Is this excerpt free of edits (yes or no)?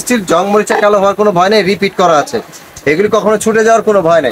yes